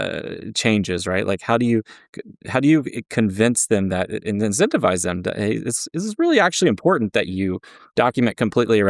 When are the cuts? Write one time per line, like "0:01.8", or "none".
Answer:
none